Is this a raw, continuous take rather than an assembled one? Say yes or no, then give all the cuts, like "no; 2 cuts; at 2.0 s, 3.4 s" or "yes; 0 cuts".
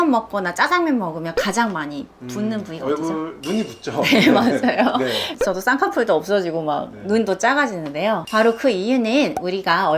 no; 2 cuts; at 5.3 s, 8.2 s